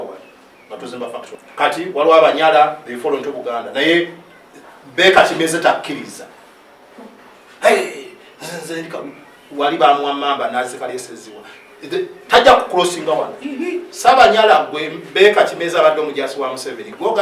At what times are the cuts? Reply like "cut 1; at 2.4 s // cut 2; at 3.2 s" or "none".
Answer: cut 1; at 1.4 s